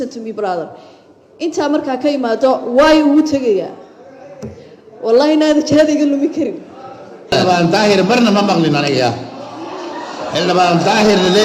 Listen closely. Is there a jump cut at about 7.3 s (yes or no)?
yes